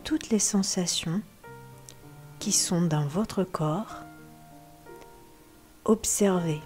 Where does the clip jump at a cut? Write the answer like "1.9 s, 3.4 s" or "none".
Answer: 3.9 s, 5.8 s